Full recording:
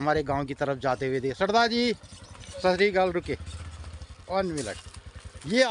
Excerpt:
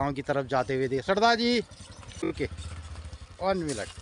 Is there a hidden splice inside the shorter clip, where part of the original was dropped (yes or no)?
yes